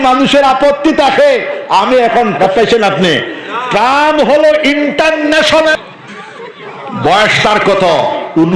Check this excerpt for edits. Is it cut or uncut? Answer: cut